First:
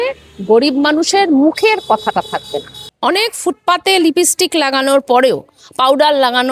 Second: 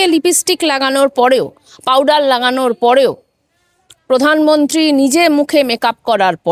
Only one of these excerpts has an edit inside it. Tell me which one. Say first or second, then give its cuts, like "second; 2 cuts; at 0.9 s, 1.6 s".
first; 1 cut; at 2.8 s